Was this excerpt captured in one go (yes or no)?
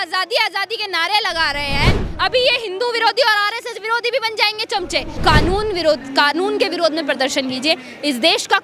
no